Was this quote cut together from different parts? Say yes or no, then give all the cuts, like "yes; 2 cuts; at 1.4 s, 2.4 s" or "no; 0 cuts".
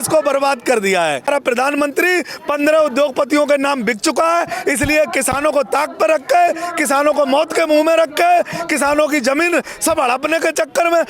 yes; 1 cut; at 1.3 s